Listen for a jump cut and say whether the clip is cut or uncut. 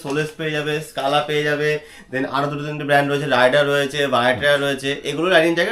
uncut